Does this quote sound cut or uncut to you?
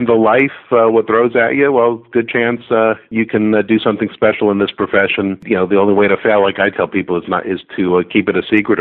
cut